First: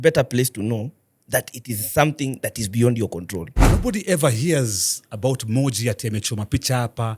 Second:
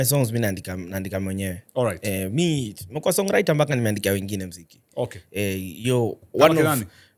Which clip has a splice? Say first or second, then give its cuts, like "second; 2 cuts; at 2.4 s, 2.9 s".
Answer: first; 1 cut; at 3.7 s